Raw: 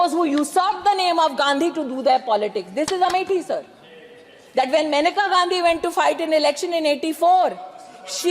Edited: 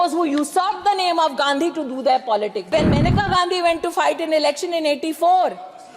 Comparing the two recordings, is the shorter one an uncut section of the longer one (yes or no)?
no